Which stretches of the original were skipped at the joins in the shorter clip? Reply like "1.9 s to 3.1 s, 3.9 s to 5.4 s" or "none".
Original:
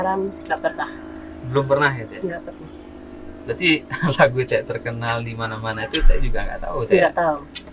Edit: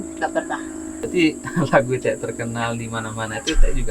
1.2 s to 3.4 s